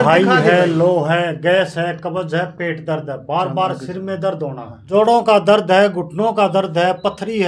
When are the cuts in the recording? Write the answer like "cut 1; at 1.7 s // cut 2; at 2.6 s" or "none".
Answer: none